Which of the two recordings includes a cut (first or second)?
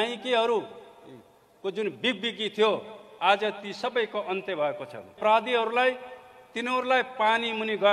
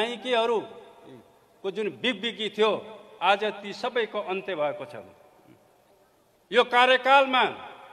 first